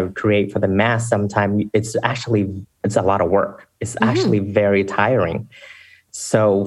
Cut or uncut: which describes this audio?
uncut